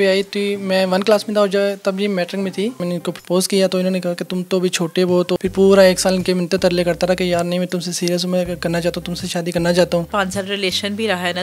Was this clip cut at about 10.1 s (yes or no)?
yes